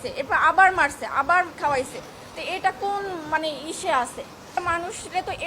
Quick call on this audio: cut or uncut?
cut